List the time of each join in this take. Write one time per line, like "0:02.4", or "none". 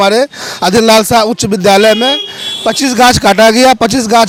none